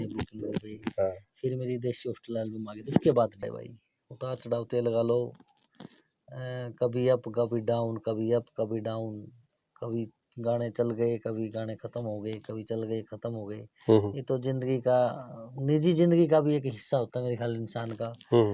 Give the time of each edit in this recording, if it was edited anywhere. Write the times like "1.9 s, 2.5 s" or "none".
3.5 s